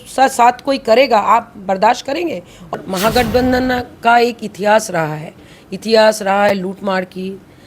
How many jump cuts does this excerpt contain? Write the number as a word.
one